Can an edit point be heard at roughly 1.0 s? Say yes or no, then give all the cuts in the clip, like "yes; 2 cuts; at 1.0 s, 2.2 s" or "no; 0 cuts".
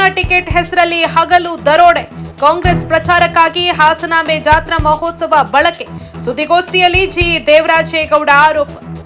no; 0 cuts